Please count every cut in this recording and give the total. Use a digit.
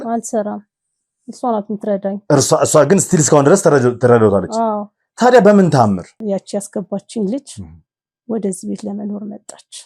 1